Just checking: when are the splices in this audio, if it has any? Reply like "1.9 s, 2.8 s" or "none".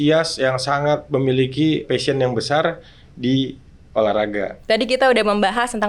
1.0 s, 1.8 s, 4.5 s